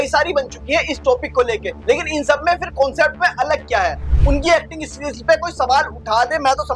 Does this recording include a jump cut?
yes; 2 cuts; at 1.7 s, 4.1 s

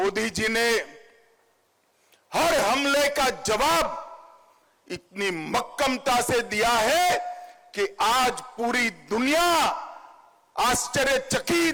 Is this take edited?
no; 0 cuts

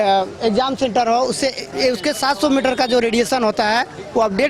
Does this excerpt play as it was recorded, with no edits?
yes; 0 cuts

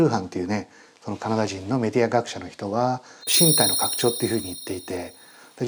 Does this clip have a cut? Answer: yes; 1 cut; at 3.3 s

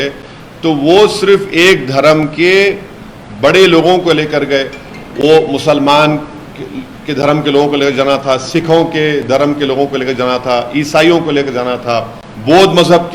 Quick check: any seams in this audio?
no; 0 cuts

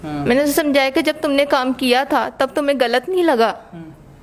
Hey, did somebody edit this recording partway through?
no; 0 cuts

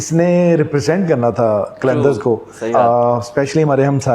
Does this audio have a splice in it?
yes; 1 cut; at 2.6 s

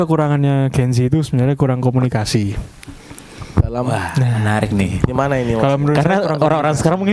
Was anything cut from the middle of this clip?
no; 0 cuts

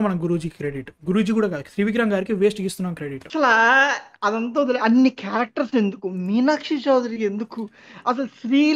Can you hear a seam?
yes; 1 cut; at 3.2 s

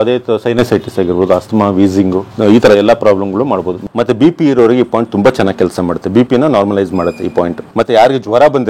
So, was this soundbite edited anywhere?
yes; 3 cuts; at 2.3 s, 3.8 s, 7.6 s

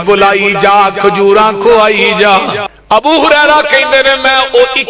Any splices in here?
yes; 1 cut; at 2.7 s

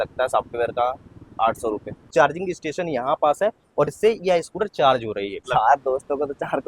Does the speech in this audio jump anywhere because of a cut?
yes; 2 cuts; at 2.1 s, 5.4 s

